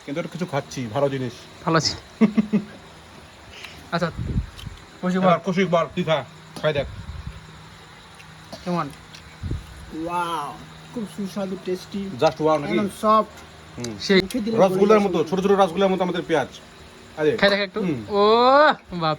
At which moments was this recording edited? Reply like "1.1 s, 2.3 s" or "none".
14.2 s